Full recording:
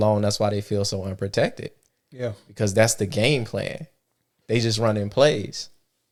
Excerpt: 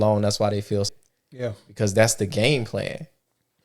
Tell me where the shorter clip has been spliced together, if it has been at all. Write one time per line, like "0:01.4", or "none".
0:01.0